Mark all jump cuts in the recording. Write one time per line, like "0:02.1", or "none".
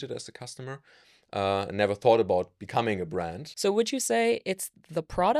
0:03.4